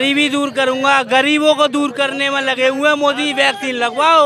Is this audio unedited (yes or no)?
yes